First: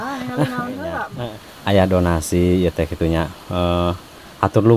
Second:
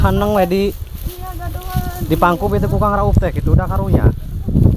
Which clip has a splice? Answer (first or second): first